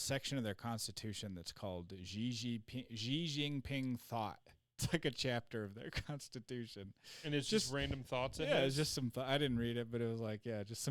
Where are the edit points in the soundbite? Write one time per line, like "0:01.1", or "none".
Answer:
0:04.8